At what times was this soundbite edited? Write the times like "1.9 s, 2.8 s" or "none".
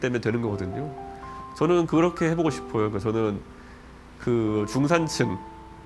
none

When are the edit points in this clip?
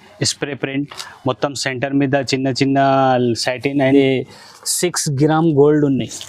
4.0 s

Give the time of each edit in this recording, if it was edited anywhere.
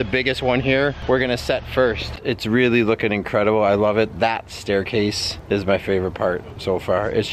2.2 s

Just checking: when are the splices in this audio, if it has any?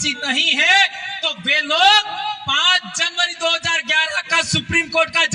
none

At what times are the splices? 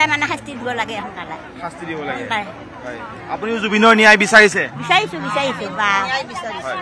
none

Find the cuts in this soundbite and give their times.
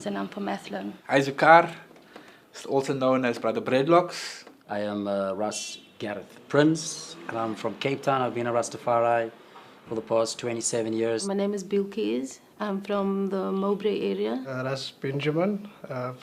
5.9 s

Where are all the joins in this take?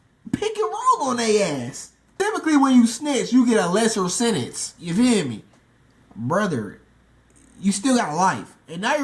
2.1 s

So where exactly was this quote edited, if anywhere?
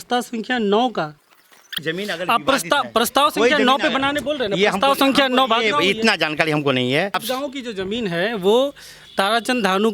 1.8 s, 7.2 s

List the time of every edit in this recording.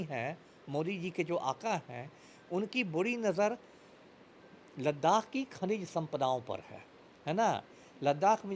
none

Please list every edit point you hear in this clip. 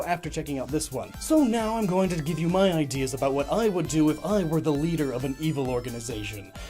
1.0 s

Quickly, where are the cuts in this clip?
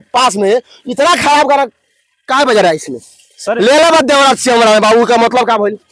none

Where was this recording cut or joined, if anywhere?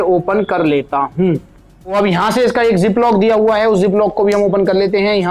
1.9 s

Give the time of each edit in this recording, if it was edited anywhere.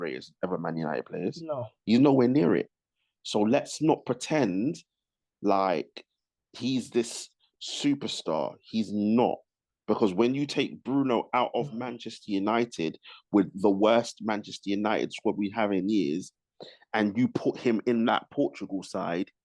none

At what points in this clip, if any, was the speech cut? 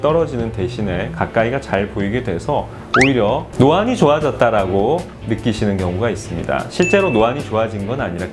none

